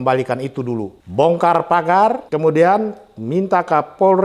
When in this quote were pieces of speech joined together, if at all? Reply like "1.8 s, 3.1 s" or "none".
1.0 s, 2.3 s